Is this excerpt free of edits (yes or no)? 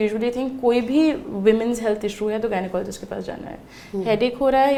yes